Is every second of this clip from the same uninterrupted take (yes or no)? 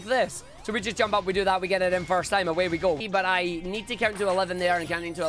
no